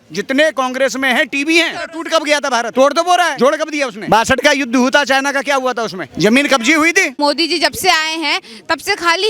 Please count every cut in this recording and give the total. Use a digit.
3